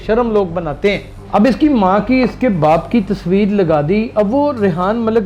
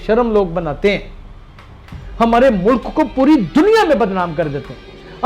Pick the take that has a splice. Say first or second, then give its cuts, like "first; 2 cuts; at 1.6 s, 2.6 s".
first; 1 cut; at 1.1 s